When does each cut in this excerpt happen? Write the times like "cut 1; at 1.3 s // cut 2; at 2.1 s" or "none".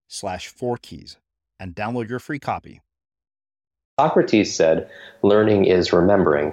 cut 1; at 3.9 s